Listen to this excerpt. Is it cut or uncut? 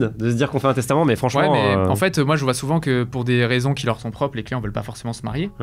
uncut